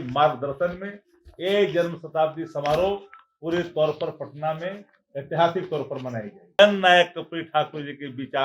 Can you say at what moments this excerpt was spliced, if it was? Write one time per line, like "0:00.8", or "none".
0:06.6